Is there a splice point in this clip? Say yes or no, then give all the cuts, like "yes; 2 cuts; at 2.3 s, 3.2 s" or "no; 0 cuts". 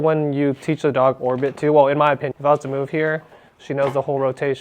yes; 1 cut; at 2.3 s